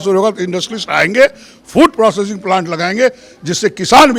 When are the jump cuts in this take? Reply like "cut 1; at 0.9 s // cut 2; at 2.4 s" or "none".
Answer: none

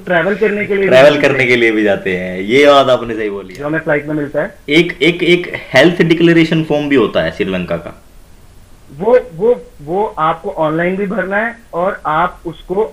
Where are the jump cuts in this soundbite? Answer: cut 1; at 3.3 s

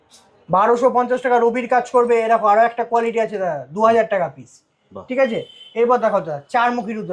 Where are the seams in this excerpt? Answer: none

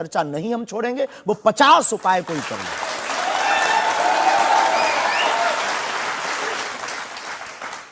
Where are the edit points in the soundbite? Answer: none

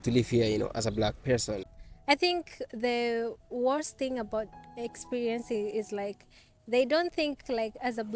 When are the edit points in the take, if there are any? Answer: cut 1; at 1.7 s

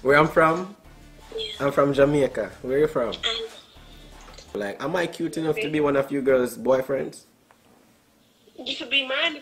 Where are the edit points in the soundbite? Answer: cut 1; at 4.7 s

